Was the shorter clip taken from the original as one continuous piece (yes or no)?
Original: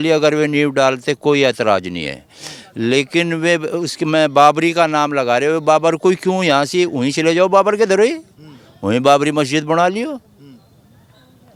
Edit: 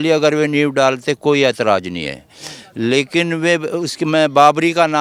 yes